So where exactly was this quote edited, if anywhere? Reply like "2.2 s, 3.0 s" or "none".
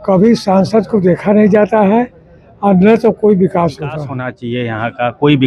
4.2 s